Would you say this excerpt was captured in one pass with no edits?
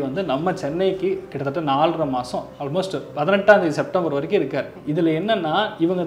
no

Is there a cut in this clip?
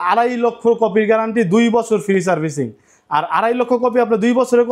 no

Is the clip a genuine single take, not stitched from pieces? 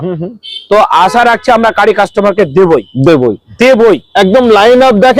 yes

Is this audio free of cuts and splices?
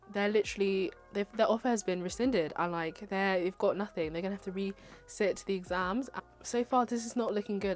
no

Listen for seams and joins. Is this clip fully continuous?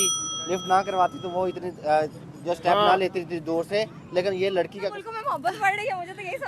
no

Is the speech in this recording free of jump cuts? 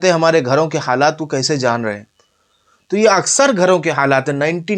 yes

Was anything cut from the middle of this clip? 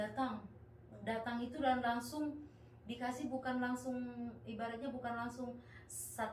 no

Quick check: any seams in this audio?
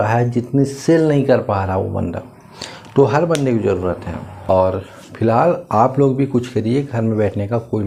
no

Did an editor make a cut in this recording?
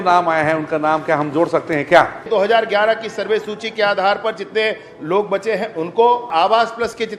yes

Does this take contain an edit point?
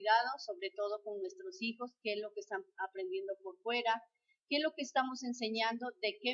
no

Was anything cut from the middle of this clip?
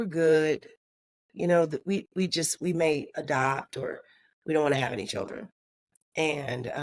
no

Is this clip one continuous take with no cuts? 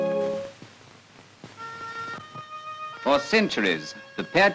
no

